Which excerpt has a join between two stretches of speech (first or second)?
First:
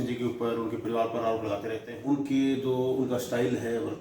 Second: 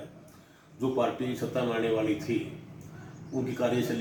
first